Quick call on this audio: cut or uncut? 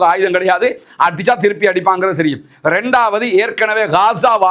uncut